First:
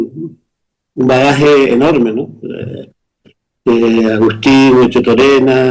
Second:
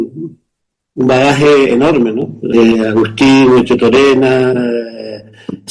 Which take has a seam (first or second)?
second